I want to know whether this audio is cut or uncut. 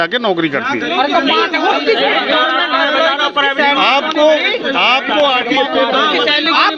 uncut